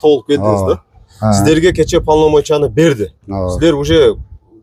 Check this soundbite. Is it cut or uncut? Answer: uncut